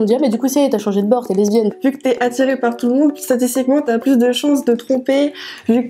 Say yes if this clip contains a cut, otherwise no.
yes